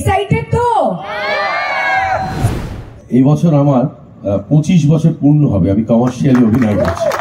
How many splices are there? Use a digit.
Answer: 1